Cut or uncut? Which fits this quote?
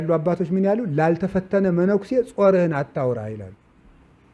uncut